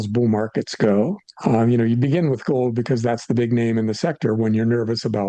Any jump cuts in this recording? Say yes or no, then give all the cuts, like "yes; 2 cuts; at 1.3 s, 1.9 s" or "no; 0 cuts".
no; 0 cuts